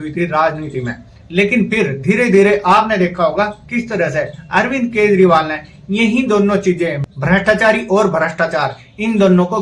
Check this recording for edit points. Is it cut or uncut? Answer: uncut